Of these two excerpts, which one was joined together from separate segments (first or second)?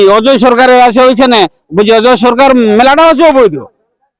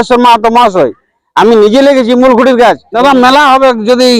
second